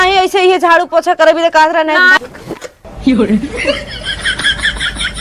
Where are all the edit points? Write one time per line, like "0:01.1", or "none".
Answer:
0:02.1